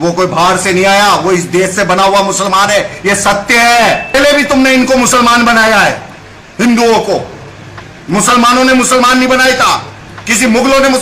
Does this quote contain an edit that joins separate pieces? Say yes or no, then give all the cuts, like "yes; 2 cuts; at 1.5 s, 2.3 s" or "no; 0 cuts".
yes; 1 cut; at 4.1 s